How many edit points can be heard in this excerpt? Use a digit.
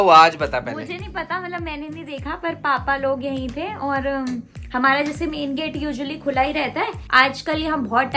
1